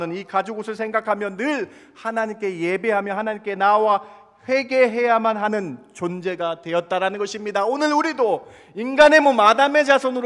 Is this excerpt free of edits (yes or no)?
yes